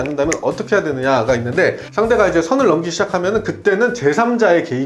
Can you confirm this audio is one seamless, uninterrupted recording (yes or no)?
yes